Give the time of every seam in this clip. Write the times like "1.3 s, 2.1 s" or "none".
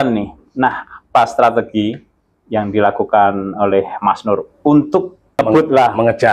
5.4 s